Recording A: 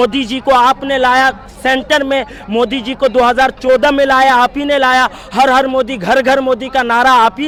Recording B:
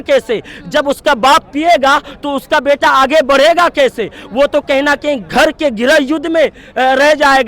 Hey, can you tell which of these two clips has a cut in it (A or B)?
B